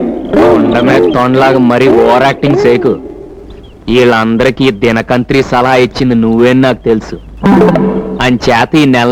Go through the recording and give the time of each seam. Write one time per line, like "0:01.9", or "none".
none